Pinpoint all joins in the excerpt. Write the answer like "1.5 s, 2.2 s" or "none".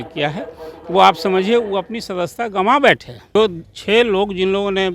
3.4 s